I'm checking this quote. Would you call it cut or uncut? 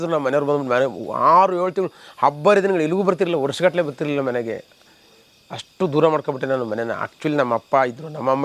uncut